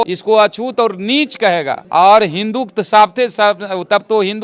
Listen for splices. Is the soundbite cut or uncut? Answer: uncut